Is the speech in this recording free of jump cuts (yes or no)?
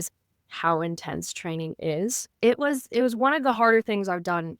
no